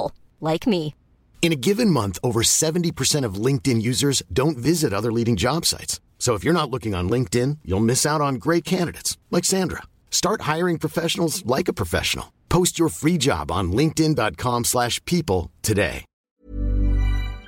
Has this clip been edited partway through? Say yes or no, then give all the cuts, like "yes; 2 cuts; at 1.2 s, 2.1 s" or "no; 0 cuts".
yes; 1 cut; at 16.3 s